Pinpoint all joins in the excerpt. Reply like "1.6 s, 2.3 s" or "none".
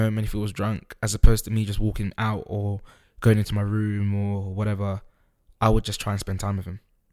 none